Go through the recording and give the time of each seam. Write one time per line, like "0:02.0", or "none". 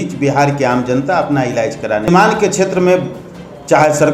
0:02.1